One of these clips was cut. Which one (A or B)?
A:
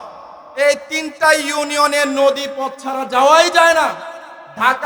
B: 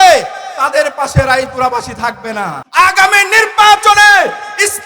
B